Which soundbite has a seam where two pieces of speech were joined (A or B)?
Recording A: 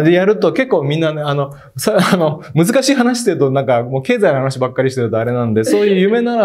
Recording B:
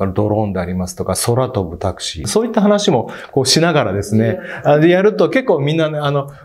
B